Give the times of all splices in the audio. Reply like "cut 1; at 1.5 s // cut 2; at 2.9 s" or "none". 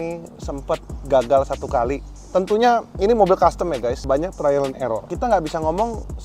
cut 1; at 4.0 s // cut 2; at 5.1 s